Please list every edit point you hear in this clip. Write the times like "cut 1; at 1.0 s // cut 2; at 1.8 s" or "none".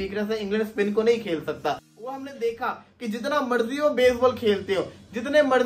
none